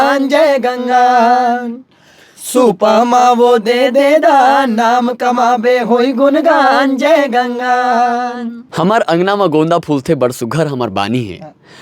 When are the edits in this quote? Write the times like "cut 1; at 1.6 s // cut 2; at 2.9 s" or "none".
cut 1; at 8.6 s